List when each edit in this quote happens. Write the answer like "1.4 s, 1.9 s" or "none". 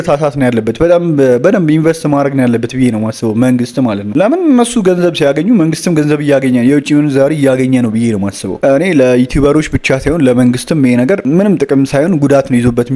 8.6 s